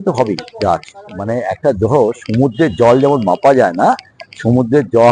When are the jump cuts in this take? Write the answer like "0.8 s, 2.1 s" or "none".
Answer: 1.2 s